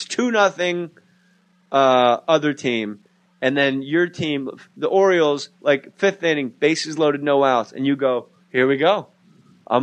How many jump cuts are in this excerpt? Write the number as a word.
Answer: zero